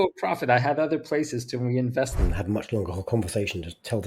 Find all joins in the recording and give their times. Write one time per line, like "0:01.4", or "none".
0:02.1